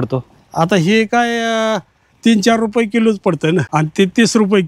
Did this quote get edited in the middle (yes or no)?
yes